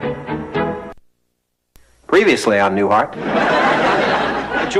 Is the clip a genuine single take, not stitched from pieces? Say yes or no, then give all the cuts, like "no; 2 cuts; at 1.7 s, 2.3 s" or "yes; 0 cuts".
yes; 0 cuts